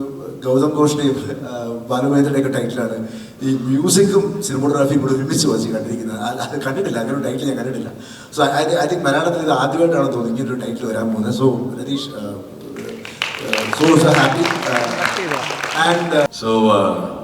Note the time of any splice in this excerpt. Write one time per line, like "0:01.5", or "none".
0:16.3